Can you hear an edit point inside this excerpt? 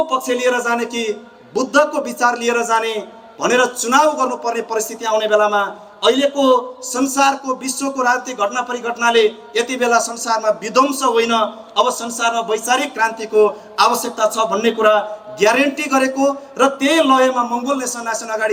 no; 0 cuts

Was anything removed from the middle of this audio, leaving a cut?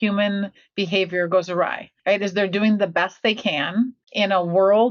yes; 2 cuts; at 1.9 s, 4.0 s

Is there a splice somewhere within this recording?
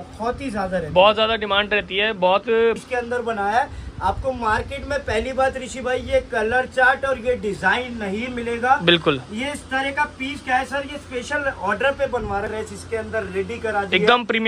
yes; 2 cuts; at 2.8 s, 12.5 s

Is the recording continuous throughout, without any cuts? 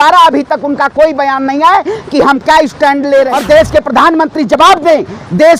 no; 1 cut; at 3.3 s

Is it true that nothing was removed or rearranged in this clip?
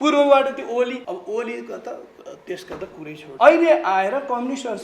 no; 2 cuts; at 1.0 s, 3.2 s

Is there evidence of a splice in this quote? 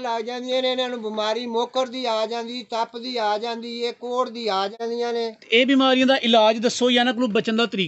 yes; 1 cut; at 4.8 s

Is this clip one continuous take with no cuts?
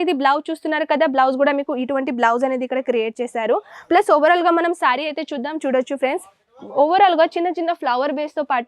yes; 0 cuts

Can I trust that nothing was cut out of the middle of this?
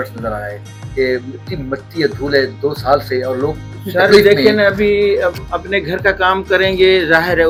yes; 0 cuts

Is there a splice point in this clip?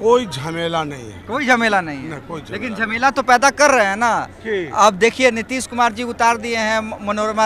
no; 0 cuts

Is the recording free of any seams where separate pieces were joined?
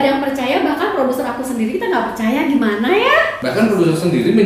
no; 1 cut; at 3.4 s

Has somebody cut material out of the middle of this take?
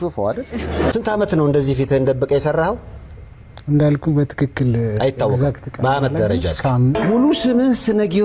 yes; 2 cuts; at 0.9 s, 7.0 s

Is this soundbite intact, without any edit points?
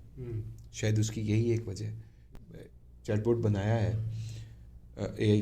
no; 1 cut; at 2.2 s

